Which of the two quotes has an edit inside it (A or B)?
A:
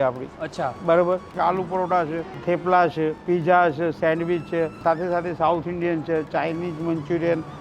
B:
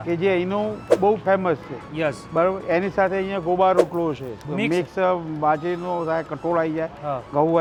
A